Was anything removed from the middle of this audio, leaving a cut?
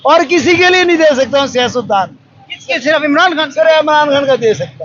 no; 0 cuts

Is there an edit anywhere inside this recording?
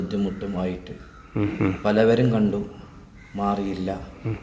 no; 0 cuts

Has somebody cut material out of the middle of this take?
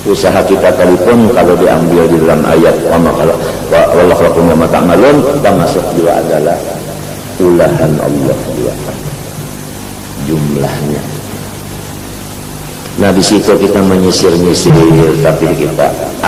no; 0 cuts

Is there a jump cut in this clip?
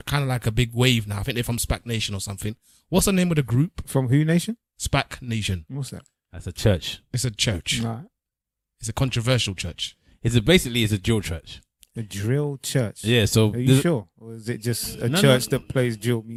no; 0 cuts

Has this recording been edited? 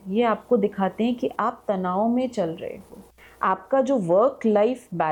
no; 0 cuts

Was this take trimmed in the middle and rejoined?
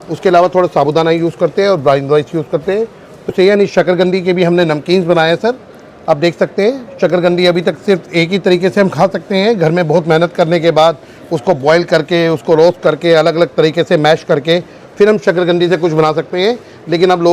yes; 1 cut; at 3.3 s

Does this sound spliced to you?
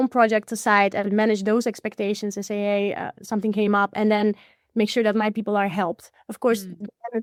no; 0 cuts

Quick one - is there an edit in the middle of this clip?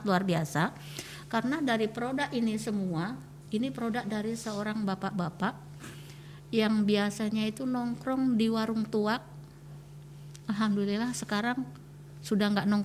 no; 0 cuts

